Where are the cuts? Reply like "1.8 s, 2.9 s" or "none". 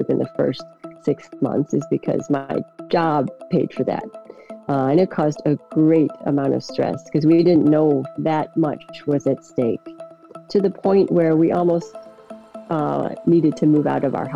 2.8 s, 8.1 s